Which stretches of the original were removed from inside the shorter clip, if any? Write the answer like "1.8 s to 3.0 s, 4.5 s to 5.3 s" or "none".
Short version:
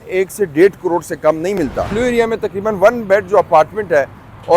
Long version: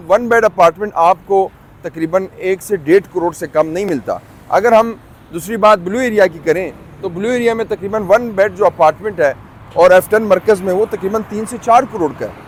4.2 s to 7.1 s